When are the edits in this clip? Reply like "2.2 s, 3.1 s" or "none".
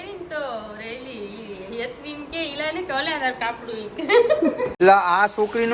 4.7 s